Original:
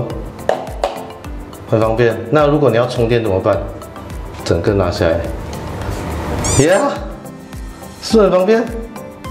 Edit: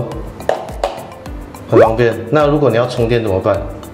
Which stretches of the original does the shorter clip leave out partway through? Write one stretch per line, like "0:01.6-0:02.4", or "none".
none